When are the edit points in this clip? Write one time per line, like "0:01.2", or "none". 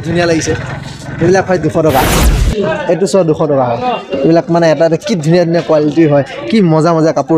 0:02.3